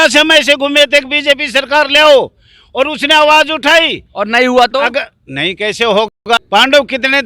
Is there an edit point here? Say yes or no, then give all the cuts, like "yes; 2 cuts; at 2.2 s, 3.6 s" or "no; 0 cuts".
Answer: yes; 1 cut; at 6.1 s